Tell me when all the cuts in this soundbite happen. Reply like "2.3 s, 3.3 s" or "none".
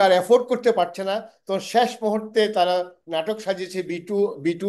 none